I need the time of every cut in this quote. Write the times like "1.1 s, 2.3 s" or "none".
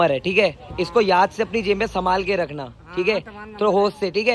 none